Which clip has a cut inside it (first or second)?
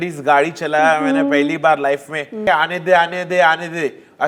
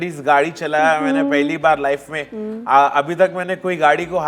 first